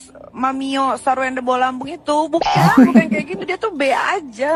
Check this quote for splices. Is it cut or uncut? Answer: uncut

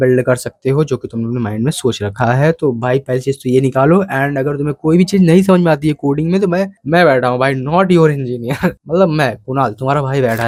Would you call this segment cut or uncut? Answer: uncut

